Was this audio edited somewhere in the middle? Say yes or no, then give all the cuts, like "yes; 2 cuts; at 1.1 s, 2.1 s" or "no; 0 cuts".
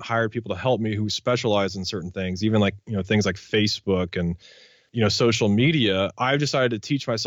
yes; 1 cut; at 4.6 s